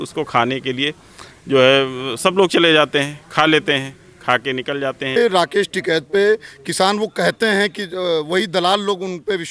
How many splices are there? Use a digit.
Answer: 1